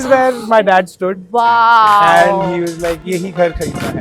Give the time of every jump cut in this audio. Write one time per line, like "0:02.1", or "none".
0:03.0